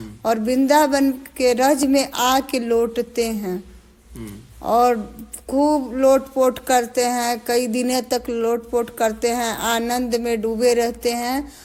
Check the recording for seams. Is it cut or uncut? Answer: uncut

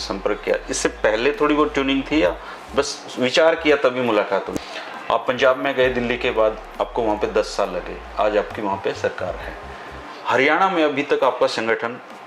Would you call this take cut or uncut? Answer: cut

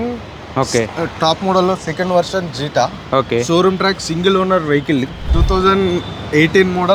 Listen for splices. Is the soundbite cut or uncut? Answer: cut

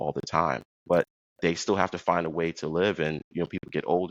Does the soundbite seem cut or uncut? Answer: cut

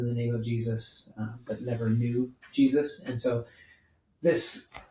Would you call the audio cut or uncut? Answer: uncut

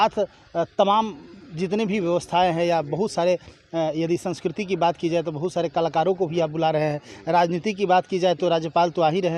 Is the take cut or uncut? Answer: uncut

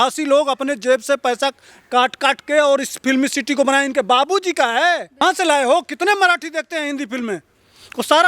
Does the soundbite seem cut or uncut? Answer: cut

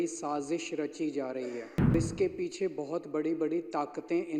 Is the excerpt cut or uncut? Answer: cut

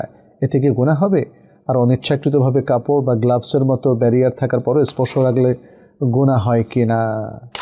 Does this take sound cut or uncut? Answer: uncut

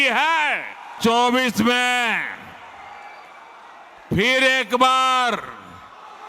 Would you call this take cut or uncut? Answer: cut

